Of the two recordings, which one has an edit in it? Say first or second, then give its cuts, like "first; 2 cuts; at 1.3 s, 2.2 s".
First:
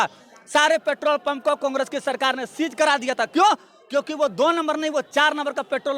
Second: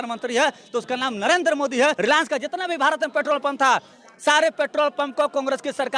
second; 1 cut; at 2.0 s